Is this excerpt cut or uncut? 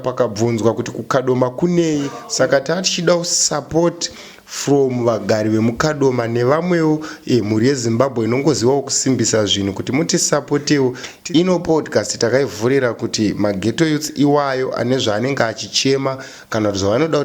cut